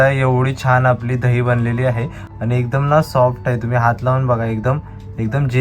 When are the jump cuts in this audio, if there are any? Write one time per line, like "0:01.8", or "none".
none